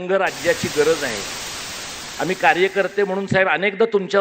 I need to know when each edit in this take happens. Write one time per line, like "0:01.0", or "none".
0:01.7